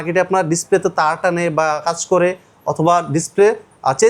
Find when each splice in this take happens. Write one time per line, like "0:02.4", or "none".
none